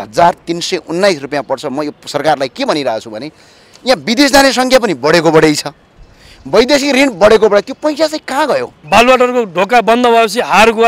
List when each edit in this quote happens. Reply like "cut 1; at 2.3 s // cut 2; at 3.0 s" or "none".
cut 1; at 8.7 s